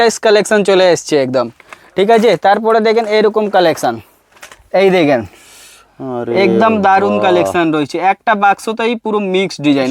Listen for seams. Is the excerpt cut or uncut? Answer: uncut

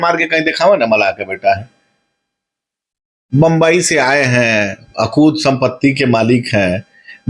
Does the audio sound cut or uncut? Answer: uncut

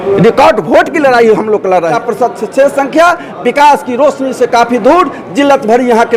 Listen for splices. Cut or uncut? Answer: cut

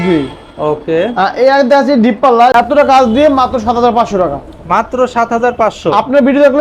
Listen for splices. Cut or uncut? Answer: cut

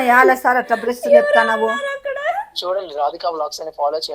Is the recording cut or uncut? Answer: uncut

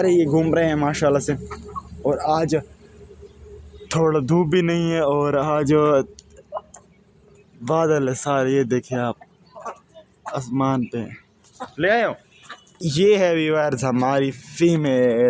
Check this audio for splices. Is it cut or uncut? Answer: uncut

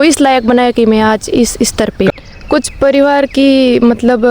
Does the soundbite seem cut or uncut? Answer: cut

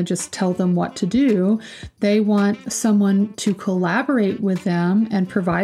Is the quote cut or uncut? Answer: cut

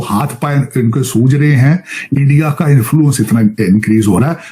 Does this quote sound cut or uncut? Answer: uncut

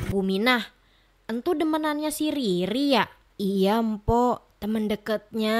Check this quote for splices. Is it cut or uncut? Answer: uncut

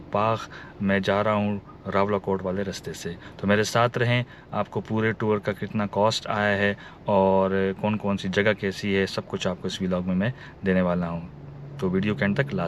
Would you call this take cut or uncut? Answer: uncut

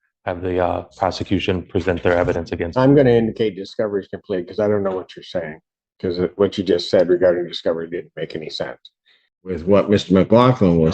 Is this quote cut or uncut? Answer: cut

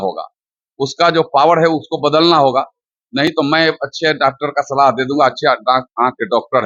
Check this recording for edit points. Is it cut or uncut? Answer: uncut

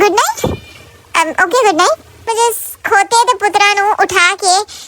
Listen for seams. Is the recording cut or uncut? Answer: cut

